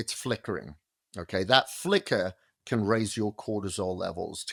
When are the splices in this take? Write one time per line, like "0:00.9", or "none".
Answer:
none